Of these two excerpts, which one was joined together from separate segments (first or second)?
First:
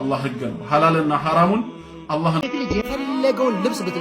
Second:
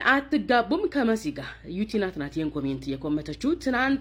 first